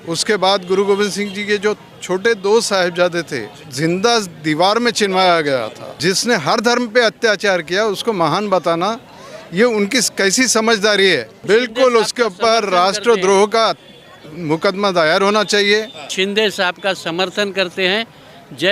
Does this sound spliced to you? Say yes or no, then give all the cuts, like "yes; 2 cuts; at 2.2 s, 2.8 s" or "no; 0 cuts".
yes; 4 cuts; at 3.7 s, 5.8 s, 11.3 s, 16.1 s